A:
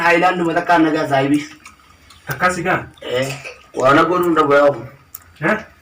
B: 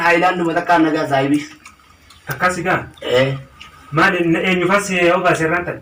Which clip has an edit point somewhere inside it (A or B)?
A